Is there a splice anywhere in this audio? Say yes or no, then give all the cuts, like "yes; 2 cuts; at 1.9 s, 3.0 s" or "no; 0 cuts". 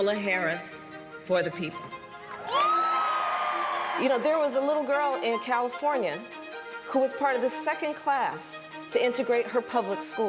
yes; 1 cut; at 3.9 s